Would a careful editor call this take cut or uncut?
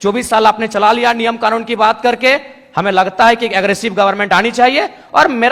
uncut